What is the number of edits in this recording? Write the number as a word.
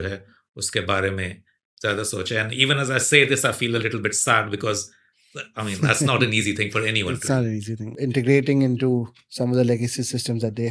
one